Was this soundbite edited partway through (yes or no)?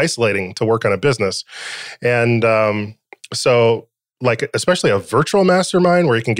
no